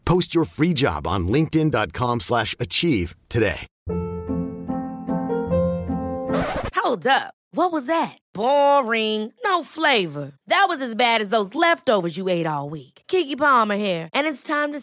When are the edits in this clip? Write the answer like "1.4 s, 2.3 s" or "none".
3.7 s